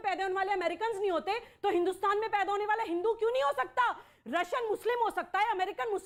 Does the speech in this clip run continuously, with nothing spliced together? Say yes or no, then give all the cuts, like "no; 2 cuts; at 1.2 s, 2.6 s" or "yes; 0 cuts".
yes; 0 cuts